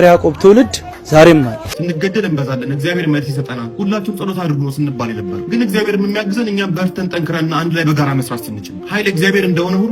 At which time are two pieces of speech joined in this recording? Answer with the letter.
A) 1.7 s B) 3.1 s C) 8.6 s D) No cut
A